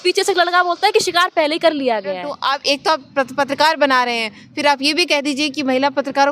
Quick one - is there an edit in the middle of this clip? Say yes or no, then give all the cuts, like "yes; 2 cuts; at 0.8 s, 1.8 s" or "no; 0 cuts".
yes; 1 cut; at 2.3 s